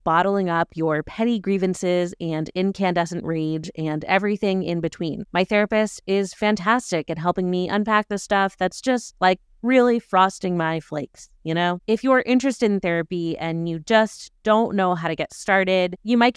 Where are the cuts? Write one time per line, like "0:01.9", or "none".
none